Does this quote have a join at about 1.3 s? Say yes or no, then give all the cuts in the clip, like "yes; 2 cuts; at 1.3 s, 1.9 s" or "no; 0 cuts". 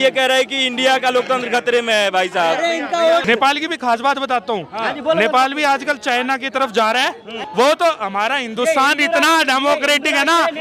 no; 2 cuts; at 3.2 s, 7.4 s